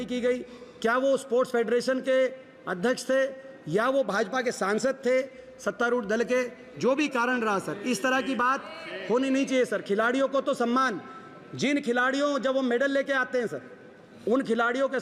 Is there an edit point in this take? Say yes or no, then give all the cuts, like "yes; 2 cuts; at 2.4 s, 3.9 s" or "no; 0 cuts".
no; 0 cuts